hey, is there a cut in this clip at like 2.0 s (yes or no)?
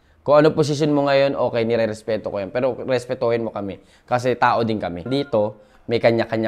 no